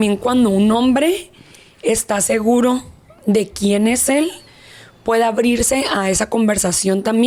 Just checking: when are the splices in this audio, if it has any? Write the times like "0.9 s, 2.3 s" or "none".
none